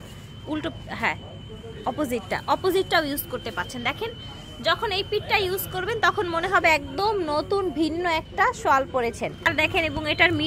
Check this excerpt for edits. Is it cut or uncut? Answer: cut